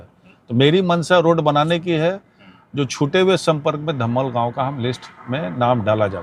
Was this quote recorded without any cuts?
yes; 0 cuts

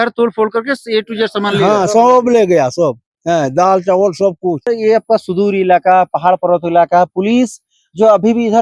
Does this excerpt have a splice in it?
yes; 1 cut; at 4.7 s

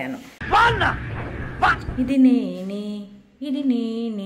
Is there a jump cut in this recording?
yes; 1 cut; at 1.8 s

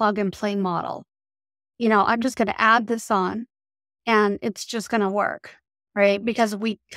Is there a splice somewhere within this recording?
no; 0 cuts

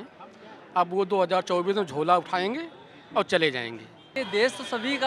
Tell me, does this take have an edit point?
yes; 1 cut; at 4.1 s

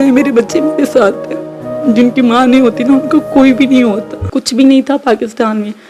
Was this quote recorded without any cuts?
no; 1 cut; at 4.2 s

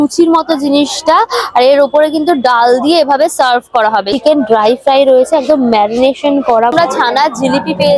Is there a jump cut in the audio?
yes; 2 cuts; at 4.1 s, 6.7 s

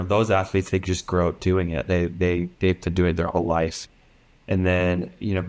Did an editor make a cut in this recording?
no; 0 cuts

